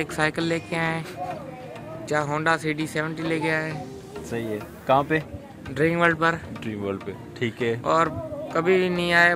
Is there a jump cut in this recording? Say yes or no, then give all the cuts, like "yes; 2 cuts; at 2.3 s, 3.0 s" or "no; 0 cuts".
no; 0 cuts